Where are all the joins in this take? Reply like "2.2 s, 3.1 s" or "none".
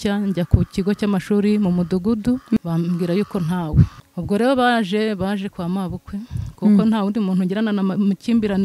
2.6 s, 4.0 s